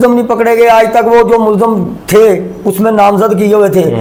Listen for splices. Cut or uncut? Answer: uncut